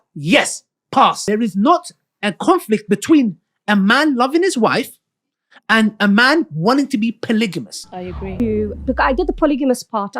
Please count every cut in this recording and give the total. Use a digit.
2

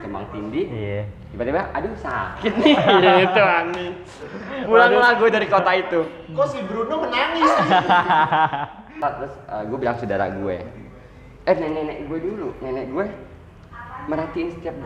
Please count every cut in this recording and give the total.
1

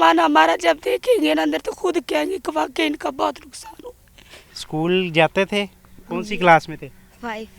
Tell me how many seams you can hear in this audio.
1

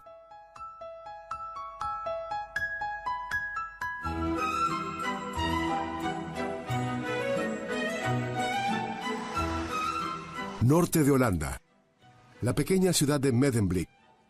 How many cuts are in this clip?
1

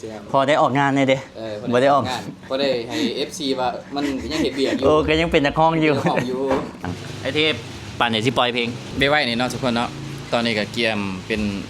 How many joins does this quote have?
2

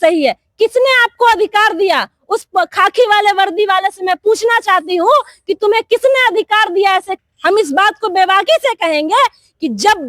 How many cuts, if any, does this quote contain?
1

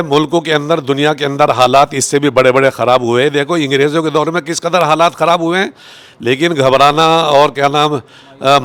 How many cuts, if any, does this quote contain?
0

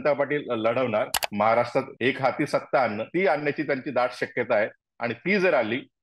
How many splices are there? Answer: 3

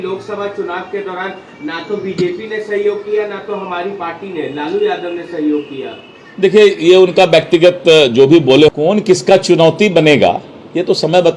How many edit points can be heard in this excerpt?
1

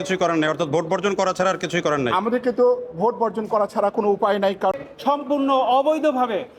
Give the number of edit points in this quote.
1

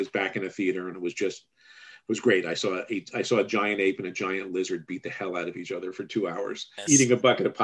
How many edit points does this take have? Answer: 1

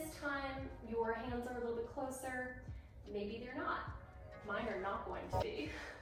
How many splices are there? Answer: 0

